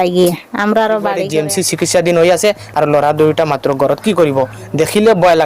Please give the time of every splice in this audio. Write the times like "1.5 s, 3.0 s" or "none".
1.2 s